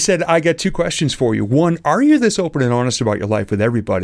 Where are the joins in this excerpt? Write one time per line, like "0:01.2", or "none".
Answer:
none